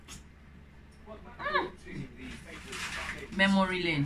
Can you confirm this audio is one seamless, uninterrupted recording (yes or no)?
no